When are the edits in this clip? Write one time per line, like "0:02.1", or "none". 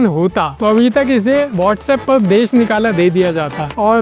none